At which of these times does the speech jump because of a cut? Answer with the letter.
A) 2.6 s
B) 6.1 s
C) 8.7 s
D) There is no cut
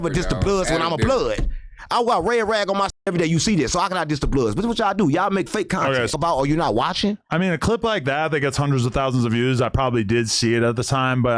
B